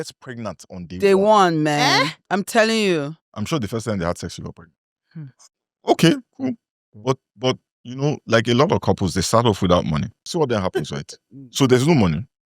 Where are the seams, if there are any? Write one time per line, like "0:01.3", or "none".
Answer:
0:03.2
0:10.2